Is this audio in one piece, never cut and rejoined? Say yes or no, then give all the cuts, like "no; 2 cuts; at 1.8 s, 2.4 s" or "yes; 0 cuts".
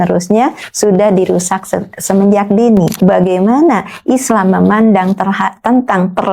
no; 1 cut; at 3.0 s